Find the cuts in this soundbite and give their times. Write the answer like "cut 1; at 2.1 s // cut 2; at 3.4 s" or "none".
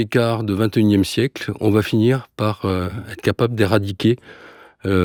none